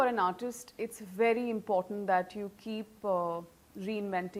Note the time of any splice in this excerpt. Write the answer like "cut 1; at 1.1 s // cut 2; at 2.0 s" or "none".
none

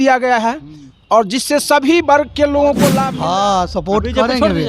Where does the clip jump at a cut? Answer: cut 1; at 3.0 s

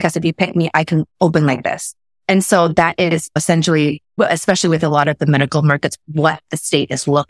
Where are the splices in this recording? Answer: none

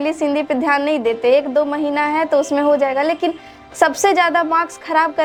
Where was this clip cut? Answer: none

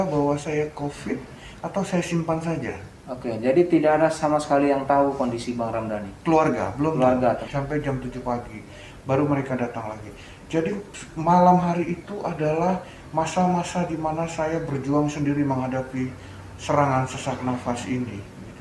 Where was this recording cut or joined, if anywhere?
cut 1; at 7.5 s

